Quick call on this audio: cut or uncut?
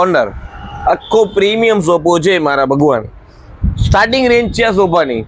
uncut